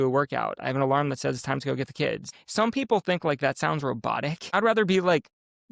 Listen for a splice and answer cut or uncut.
cut